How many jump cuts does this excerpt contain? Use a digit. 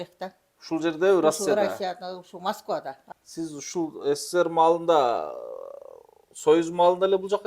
1